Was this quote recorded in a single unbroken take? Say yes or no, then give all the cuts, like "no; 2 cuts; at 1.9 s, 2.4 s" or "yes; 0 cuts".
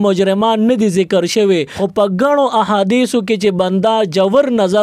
no; 1 cut; at 1.8 s